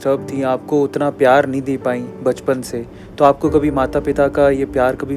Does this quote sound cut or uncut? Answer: uncut